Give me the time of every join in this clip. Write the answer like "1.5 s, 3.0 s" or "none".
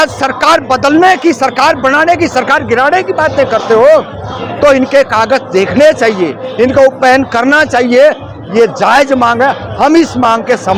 none